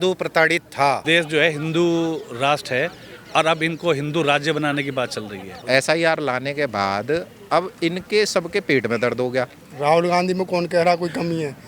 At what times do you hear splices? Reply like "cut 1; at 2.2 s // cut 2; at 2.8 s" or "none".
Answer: cut 1; at 1.0 s // cut 2; at 5.6 s // cut 3; at 9.6 s

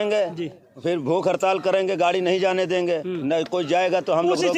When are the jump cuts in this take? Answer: none

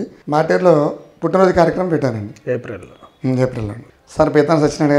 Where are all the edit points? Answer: cut 1; at 3.8 s

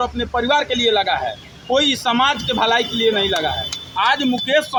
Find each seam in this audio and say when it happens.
none

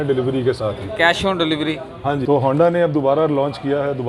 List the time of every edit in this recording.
cut 1; at 2.2 s

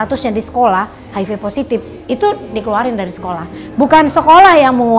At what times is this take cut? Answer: none

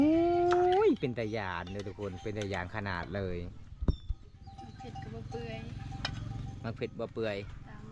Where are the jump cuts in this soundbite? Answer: none

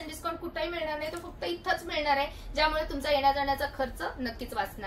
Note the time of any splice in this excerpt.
none

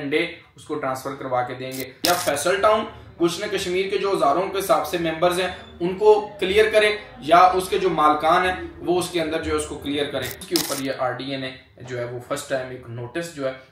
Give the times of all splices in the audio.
cut 1; at 1.9 s // cut 2; at 10.3 s

